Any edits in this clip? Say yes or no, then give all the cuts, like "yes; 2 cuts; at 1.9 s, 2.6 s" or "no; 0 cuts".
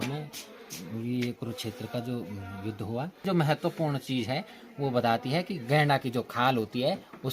yes; 1 cut; at 3.2 s